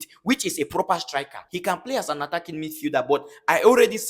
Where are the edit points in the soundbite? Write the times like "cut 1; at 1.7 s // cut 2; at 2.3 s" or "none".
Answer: cut 1; at 1.4 s